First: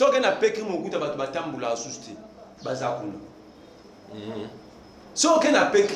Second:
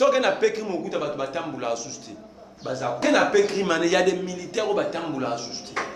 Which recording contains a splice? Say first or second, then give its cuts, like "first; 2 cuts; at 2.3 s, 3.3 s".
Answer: second; 1 cut; at 3.0 s